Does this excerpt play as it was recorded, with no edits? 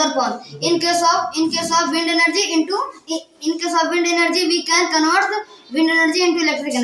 yes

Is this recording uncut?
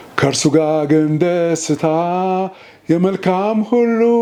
yes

